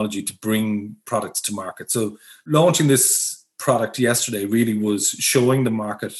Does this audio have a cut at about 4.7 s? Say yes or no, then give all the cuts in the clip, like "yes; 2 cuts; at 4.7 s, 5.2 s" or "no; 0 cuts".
no; 2 cuts; at 1.0 s, 2.3 s